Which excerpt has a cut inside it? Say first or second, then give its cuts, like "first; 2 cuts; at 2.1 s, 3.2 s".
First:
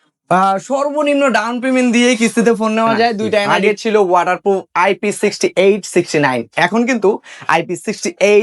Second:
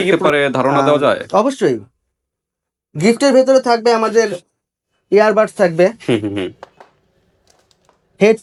first; 1 cut; at 3.5 s